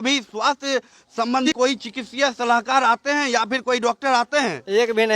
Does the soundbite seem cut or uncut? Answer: cut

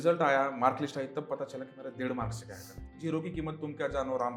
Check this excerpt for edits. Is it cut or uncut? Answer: cut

